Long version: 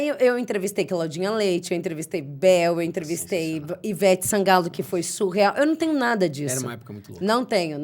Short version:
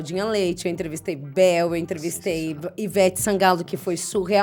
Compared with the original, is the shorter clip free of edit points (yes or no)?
yes